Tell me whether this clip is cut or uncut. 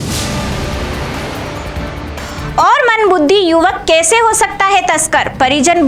uncut